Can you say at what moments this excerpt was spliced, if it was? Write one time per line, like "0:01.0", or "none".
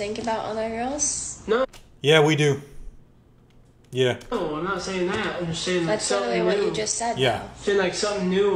none